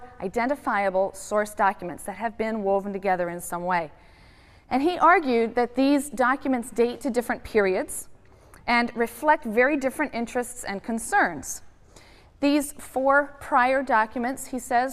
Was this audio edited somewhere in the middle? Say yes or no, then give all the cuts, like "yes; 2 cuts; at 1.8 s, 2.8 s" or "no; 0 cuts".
no; 0 cuts